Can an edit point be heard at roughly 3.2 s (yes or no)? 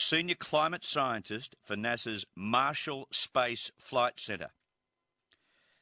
yes